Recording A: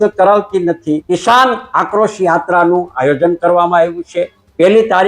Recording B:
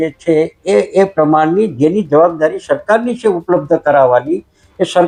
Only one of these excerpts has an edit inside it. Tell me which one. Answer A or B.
A